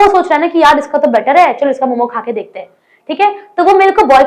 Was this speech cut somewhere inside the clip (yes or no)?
no